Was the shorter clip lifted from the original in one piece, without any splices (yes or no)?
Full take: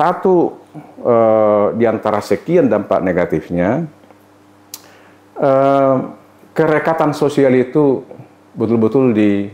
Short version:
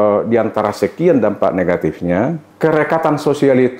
no